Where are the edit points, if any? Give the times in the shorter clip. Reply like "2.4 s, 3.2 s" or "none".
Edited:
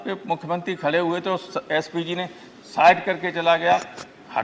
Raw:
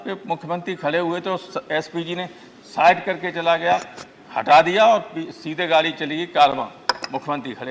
none